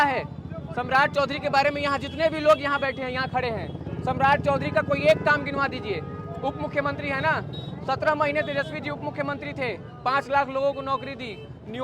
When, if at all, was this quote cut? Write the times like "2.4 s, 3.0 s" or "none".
none

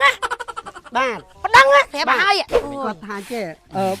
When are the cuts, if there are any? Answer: 2.5 s

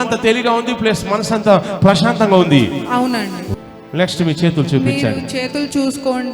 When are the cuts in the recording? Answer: 3.4 s

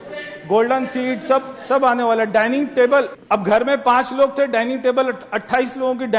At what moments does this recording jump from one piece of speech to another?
3.2 s

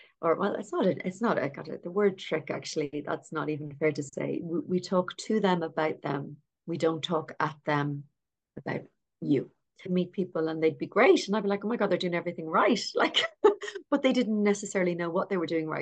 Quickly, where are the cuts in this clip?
9.9 s

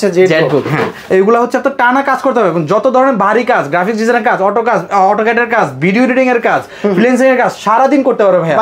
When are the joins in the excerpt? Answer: 1.0 s

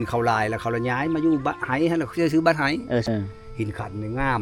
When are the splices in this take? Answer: 3.1 s

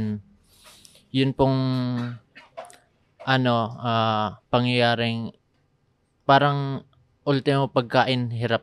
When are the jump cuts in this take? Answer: none

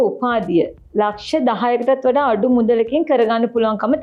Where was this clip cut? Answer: none

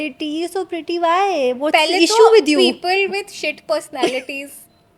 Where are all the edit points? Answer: none

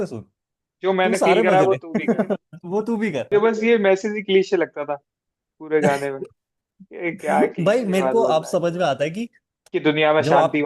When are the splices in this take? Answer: 3.3 s

